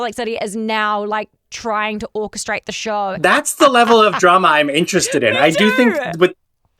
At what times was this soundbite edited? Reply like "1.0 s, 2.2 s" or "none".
3.2 s

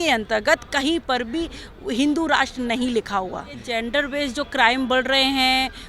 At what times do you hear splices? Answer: 3.6 s

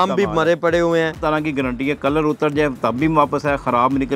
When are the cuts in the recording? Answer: 1.2 s

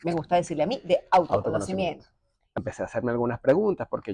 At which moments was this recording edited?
2.5 s

